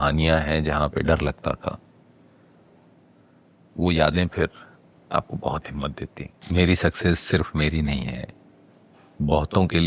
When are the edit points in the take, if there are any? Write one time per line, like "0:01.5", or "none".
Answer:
0:06.4